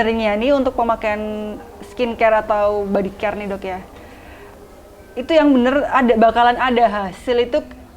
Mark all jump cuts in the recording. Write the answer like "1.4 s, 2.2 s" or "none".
none